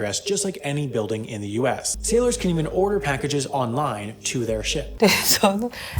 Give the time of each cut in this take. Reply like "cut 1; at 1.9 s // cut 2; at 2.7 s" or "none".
cut 1; at 1.9 s // cut 2; at 4.9 s